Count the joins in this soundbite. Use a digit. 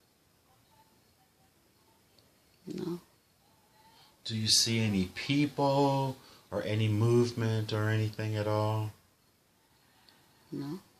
0